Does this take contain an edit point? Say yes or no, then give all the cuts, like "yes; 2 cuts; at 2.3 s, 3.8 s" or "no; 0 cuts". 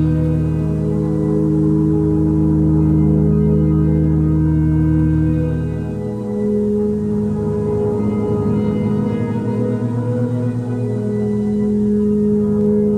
no; 0 cuts